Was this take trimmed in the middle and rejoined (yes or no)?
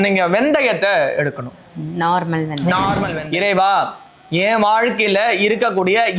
yes